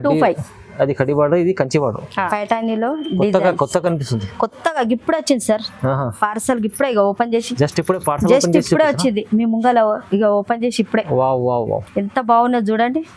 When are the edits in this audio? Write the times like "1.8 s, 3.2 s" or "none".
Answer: 2.3 s